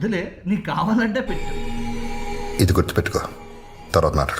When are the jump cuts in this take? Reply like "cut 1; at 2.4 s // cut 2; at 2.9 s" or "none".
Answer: cut 1; at 1.4 s